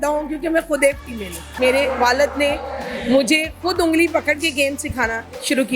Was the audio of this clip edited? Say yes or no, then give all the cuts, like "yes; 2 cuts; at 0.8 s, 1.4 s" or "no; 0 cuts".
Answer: yes; 1 cut; at 1.5 s